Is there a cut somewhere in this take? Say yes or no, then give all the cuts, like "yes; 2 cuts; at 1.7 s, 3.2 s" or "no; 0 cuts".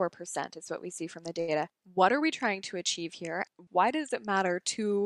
yes; 2 cuts; at 1.8 s, 3.5 s